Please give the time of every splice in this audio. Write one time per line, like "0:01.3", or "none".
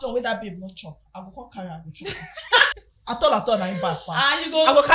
0:02.7